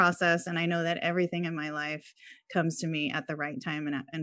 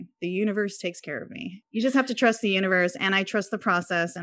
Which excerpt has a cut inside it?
second; 1 cut; at 1.6 s

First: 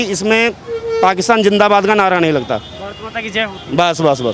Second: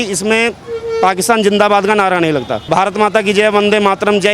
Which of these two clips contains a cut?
second; 1 cut; at 2.7 s

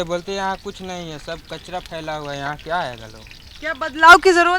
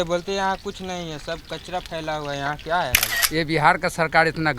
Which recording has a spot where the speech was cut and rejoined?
second; 1 cut; at 3.1 s

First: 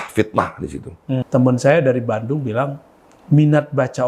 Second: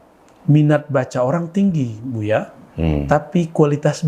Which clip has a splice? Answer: first; 1 cut; at 1.2 s

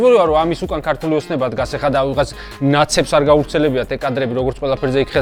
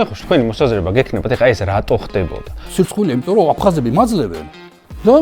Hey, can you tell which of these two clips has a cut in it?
second; 1 cut; at 2.6 s

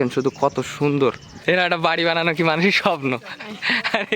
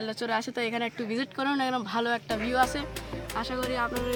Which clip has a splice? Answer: first; 1 cut; at 1.3 s

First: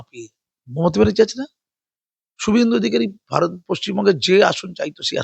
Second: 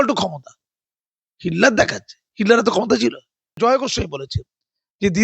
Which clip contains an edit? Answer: second; 1 cut; at 3.6 s

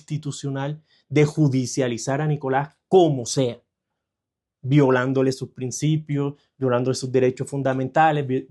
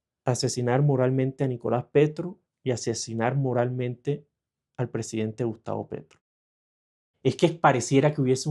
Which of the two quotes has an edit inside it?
second; 1 cut; at 6.8 s

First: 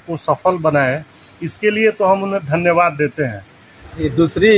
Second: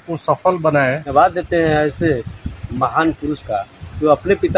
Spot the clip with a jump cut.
second; 1 cut; at 1.1 s

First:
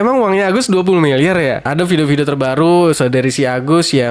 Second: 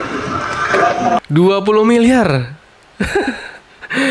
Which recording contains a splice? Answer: first; 1 cut; at 1.7 s

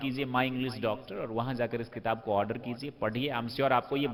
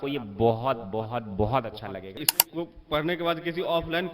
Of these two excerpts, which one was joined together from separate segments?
second; 1 cut; at 2.3 s

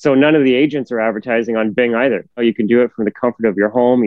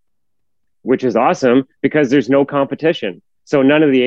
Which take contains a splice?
first; 1 cut; at 2.4 s

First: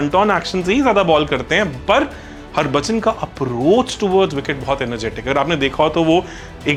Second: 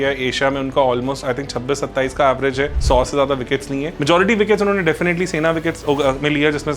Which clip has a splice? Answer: second; 2 cuts; at 2.8 s, 3.9 s

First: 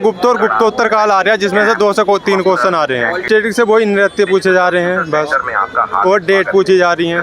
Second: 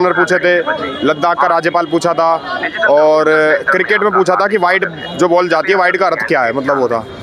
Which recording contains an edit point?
first; 1 cut; at 3.2 s

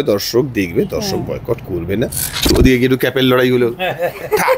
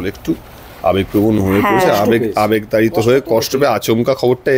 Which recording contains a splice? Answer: first; 1 cut; at 2.5 s

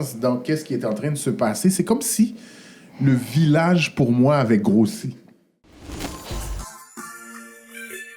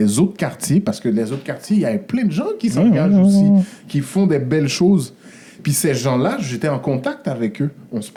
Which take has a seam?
first; 1 cut; at 5.8 s

